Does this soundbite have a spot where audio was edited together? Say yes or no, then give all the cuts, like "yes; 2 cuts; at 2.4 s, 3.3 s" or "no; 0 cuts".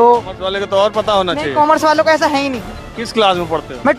no; 0 cuts